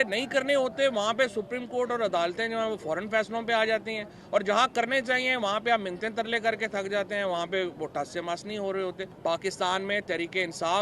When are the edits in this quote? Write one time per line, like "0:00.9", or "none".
0:09.1